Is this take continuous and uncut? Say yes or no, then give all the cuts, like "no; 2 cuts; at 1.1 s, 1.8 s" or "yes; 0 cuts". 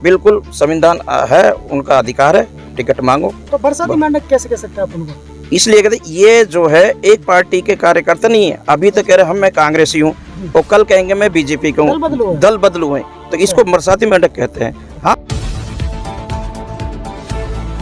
no; 1 cut; at 15.1 s